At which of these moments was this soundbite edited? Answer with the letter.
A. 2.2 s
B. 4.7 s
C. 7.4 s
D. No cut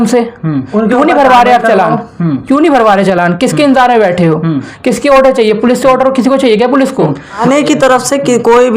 C